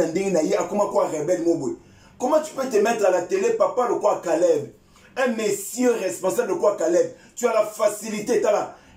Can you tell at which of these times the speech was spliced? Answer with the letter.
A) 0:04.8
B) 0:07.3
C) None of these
C